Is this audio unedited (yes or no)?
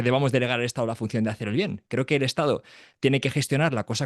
yes